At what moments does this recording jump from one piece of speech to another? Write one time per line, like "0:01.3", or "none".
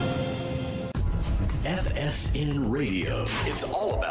0:00.9